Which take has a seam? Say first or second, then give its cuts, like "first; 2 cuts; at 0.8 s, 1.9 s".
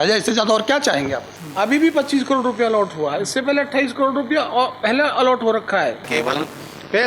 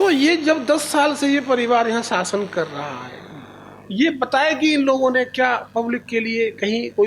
first; 2 cuts; at 1.3 s, 6.1 s